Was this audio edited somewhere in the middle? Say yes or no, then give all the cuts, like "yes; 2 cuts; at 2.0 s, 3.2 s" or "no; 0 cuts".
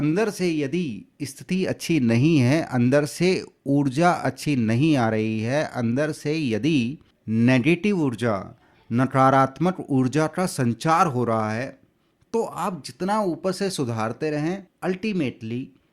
yes; 2 cuts; at 7.1 s, 14.7 s